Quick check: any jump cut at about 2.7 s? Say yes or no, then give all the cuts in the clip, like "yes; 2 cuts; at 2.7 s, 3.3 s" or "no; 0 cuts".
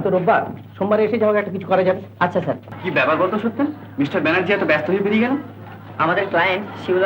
yes; 1 cut; at 2.7 s